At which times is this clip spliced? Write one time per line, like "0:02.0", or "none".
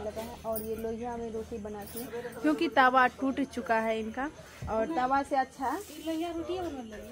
none

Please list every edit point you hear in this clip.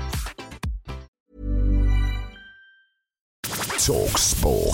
0:01.1
0:03.4

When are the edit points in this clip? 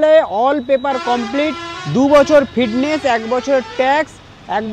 none

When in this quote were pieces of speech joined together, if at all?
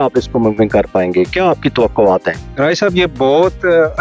none

